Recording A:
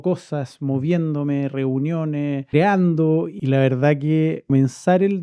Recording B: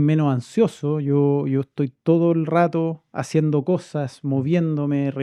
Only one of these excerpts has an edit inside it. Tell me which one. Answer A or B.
A